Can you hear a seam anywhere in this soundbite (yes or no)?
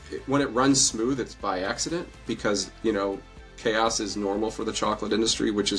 no